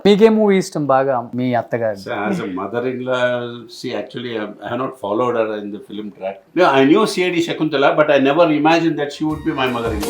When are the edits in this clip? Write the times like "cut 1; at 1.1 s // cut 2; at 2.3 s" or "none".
cut 1; at 1.3 s // cut 2; at 6.4 s